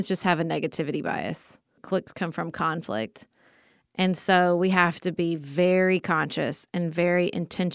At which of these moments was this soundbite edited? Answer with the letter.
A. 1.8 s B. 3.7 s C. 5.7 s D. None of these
A